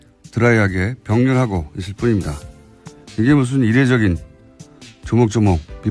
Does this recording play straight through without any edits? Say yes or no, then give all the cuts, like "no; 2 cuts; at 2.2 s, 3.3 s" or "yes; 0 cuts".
no; 1 cut; at 2.3 s